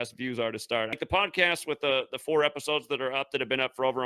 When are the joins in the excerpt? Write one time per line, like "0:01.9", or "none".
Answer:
0:01.0